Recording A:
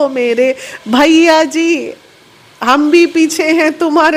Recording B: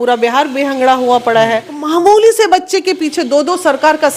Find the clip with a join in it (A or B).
B